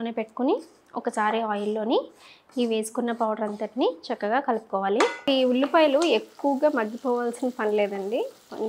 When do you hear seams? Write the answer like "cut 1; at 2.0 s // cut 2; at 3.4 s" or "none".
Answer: cut 1; at 5.2 s